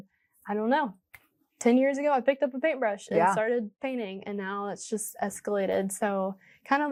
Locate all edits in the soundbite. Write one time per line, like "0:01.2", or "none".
none